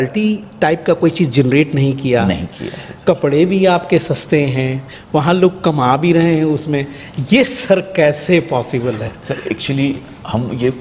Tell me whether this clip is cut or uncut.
uncut